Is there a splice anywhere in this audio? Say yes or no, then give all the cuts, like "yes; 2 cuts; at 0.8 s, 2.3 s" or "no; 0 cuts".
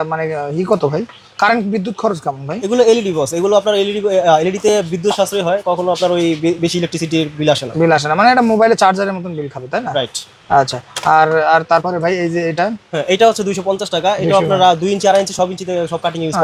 no; 0 cuts